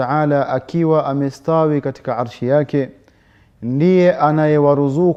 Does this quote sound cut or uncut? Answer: uncut